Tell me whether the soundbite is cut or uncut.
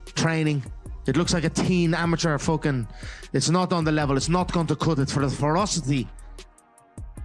uncut